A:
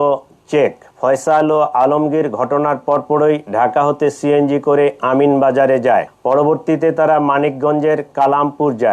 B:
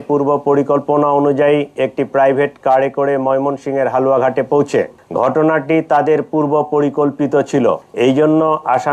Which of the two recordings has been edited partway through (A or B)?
A